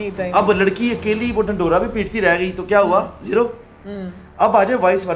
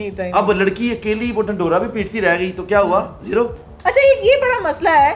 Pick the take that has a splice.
second; 1 cut; at 3.7 s

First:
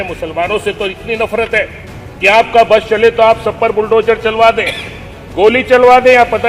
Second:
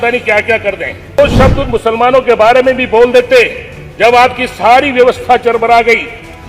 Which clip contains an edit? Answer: second; 1 cut; at 1.2 s

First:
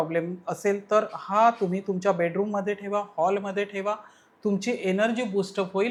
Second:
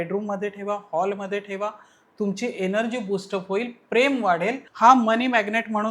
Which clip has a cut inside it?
second; 1 cut; at 4.7 s

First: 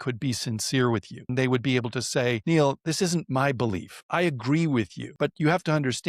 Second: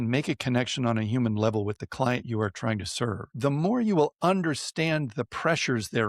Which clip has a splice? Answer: first; 4 cuts; at 1.3 s, 2.4 s, 3.9 s, 5.0 s

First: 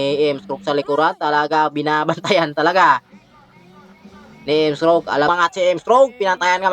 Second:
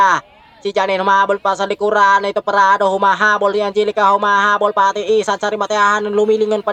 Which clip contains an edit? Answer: first; 1 cut; at 5.3 s

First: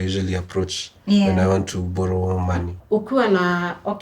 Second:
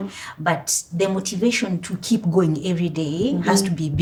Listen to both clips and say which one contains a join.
first; 1 cut; at 2.8 s

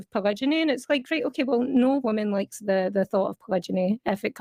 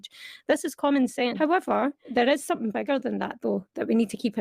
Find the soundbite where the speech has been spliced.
second; 1 cut; at 1.3 s

